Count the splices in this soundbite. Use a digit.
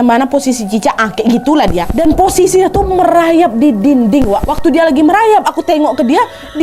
1